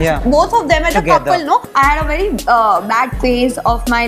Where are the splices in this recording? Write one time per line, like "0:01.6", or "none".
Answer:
0:01.7